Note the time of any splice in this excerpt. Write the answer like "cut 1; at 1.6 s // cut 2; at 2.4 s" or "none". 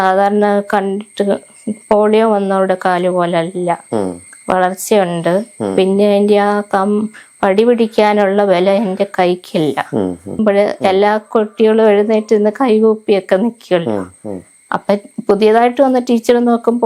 cut 1; at 10.4 s